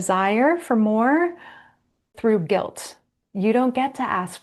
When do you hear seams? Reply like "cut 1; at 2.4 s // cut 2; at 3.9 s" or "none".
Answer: cut 1; at 2.1 s // cut 2; at 3.1 s

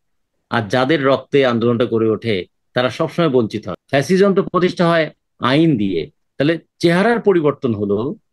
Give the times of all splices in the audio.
cut 1; at 3.7 s

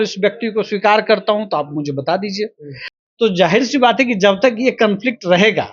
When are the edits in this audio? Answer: cut 1; at 2.8 s

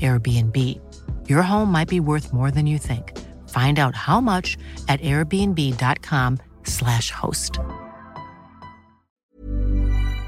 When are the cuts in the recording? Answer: cut 1; at 9.4 s

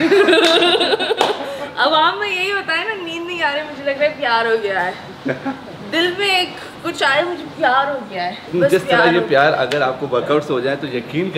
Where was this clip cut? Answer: none

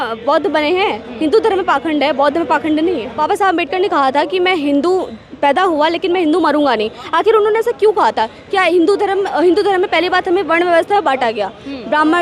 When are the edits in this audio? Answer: cut 1; at 3.2 s

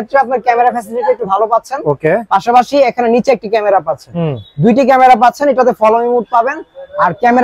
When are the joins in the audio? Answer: none

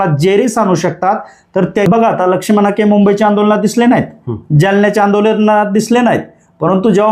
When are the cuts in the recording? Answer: cut 1; at 1.9 s

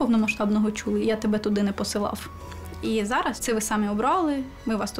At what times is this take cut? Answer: cut 1; at 1.0 s // cut 2; at 3.4 s

